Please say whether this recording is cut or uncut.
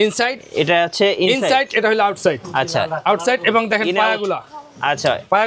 uncut